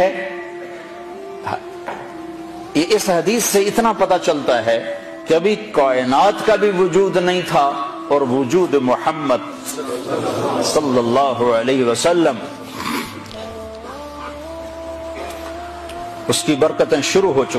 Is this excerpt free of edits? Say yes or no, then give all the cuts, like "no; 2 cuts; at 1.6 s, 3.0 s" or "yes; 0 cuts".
no; 1 cut; at 15.1 s